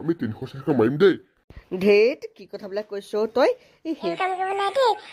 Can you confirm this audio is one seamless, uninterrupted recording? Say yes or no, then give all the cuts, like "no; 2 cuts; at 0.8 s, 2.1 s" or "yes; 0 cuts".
no; 1 cut; at 4.1 s